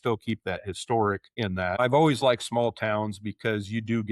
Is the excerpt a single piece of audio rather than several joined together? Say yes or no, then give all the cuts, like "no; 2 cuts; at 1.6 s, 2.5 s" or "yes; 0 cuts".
no; 1 cut; at 1.8 s